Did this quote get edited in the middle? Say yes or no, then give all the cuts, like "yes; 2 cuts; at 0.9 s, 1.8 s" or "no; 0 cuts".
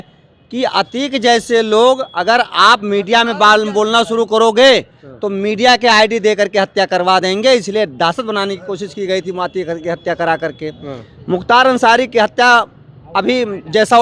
no; 0 cuts